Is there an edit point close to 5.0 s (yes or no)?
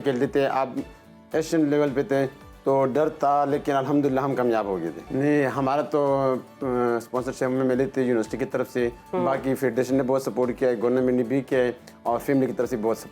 yes